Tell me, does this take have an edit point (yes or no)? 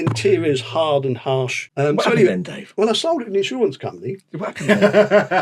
yes